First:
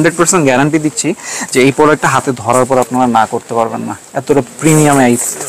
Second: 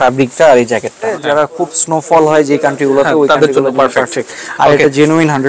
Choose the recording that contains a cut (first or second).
second